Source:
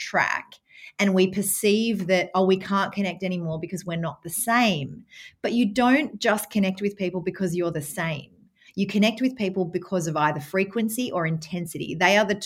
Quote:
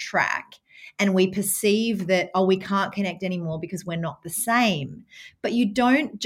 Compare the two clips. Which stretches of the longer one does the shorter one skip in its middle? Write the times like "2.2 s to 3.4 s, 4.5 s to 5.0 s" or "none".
none